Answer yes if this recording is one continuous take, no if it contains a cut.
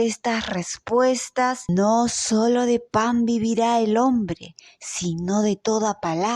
no